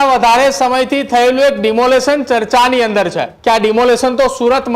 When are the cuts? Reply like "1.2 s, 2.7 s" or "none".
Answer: 3.3 s